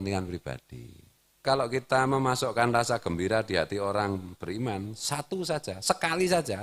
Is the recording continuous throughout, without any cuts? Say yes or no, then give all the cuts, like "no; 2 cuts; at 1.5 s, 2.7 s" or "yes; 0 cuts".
no; 1 cut; at 1.4 s